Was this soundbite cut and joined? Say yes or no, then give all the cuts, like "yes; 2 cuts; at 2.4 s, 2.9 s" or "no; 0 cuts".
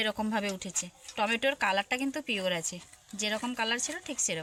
no; 0 cuts